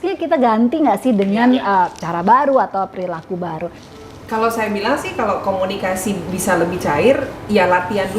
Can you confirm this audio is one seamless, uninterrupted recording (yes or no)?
no